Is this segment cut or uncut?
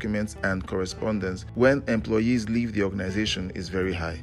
cut